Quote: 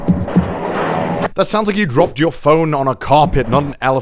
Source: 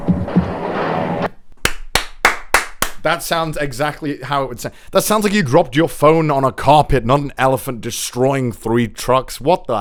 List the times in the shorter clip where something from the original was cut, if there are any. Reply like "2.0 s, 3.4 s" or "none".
1.3 s